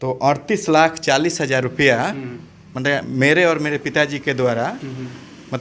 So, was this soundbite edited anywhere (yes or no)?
no